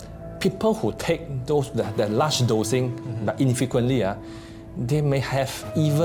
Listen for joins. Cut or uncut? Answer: uncut